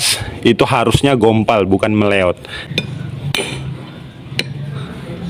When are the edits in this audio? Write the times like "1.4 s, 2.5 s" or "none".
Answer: 2.6 s